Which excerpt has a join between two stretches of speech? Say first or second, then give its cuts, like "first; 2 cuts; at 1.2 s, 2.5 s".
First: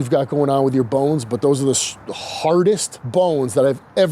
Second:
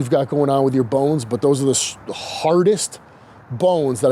first; 1 cut; at 2.9 s